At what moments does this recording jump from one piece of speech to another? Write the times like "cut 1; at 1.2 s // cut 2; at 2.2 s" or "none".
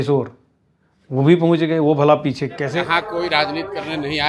cut 1; at 2.8 s